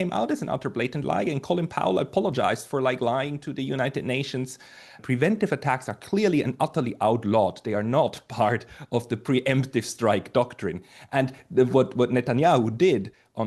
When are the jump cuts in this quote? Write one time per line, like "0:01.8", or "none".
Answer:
0:05.0

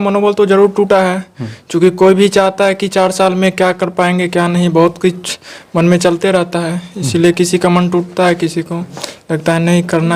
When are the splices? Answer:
none

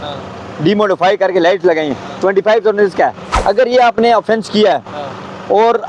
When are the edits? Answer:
0:03.3

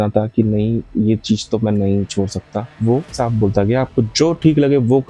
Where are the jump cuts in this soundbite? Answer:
0:02.7

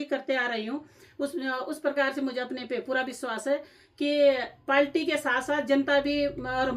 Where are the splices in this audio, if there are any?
none

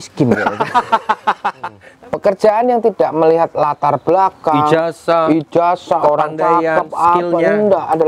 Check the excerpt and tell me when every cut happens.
0:01.8

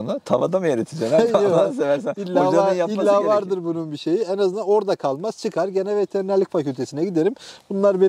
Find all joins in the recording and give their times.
none

